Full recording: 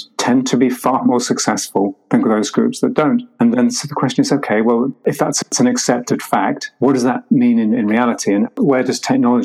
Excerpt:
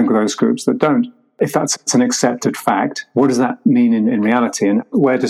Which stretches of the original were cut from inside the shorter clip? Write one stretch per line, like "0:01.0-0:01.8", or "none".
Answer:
0:03.4-0:04.9